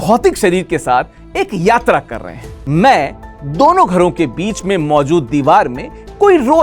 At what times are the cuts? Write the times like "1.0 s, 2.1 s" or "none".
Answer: 2.6 s